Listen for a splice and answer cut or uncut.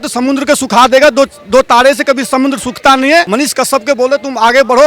cut